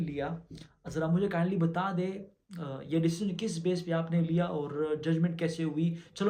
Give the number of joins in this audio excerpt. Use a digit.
0